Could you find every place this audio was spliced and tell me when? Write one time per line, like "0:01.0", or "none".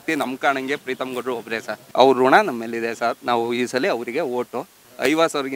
0:01.8